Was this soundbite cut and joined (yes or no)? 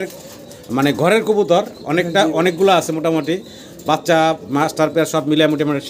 no